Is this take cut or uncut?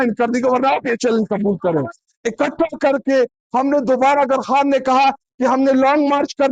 cut